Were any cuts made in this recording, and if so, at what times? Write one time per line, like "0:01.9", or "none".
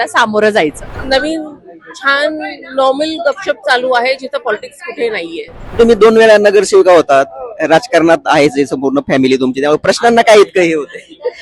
0:00.9
0:05.8